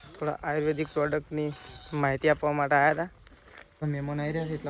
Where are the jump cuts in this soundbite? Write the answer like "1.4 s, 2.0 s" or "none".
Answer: 3.8 s